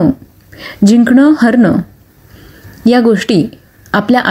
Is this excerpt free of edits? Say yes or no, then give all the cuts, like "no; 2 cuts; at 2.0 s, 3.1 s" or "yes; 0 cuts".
yes; 0 cuts